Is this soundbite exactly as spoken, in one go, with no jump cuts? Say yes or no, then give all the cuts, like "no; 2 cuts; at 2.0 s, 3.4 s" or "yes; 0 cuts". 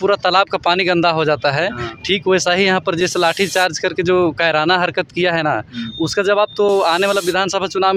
yes; 0 cuts